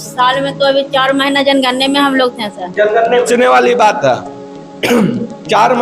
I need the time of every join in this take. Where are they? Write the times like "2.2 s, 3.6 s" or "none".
3.3 s